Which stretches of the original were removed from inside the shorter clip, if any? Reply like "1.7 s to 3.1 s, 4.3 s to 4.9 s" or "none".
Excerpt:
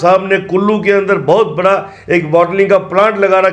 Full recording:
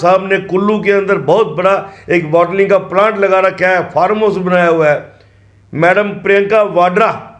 none